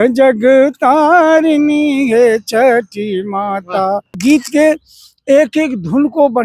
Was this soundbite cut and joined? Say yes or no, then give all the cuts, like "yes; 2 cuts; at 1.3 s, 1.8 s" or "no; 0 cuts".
yes; 1 cut; at 4.2 s